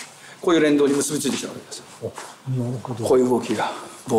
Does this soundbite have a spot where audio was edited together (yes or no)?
no